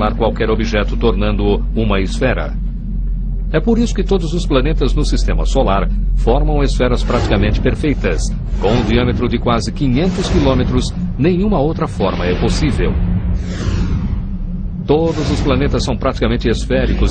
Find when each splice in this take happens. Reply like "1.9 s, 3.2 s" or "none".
4.9 s